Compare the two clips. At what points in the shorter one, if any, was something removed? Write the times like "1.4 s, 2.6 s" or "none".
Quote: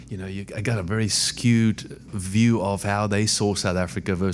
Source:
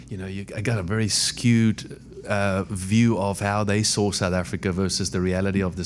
2.2 s

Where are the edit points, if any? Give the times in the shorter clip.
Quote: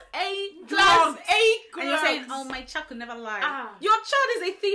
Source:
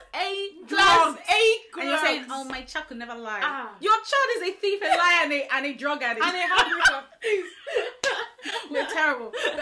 none

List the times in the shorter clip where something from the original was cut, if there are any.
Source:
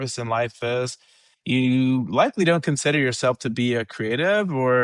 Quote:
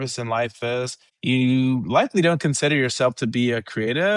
1.0 s

